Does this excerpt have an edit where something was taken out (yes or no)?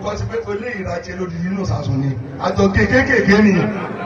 no